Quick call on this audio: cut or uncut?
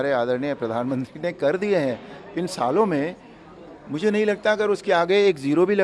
uncut